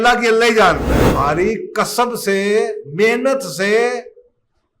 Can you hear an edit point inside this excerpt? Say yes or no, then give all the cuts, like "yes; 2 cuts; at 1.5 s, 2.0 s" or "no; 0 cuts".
yes; 1 cut; at 1.0 s